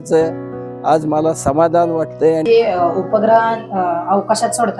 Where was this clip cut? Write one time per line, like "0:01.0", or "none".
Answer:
0:02.4

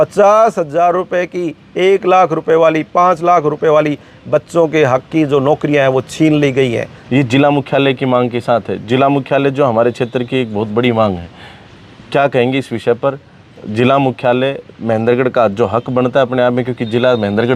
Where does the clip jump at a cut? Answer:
0:06.9

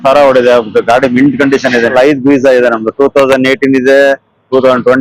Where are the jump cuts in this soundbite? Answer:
0:01.9

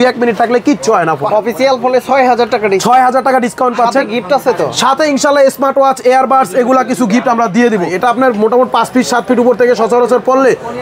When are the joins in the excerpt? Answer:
0:01.2
0:07.9

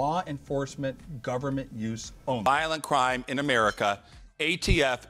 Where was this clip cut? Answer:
0:02.4

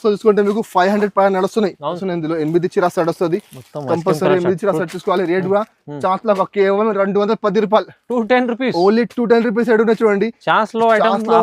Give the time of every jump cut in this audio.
0:02.0

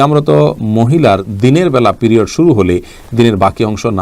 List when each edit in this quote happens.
none

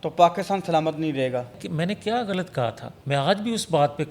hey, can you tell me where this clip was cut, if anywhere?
0:01.6
0:02.9

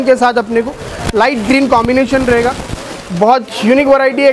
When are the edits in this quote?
none

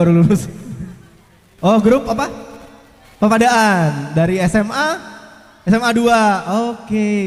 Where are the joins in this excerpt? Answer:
none

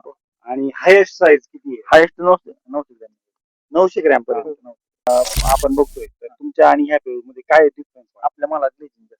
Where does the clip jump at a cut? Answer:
0:05.1

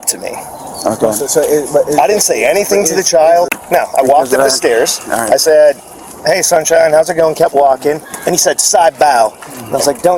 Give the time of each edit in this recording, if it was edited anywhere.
0:03.6

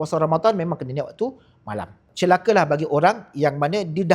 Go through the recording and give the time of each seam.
0:02.1

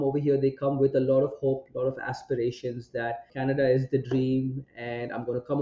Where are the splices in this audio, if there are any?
0:03.3

